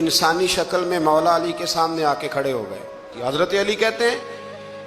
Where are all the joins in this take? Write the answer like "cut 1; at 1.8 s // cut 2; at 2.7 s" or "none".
cut 1; at 3.1 s